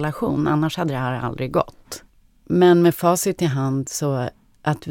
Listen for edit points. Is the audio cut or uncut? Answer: uncut